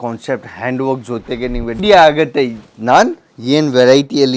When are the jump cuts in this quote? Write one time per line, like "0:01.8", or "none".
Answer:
0:01.8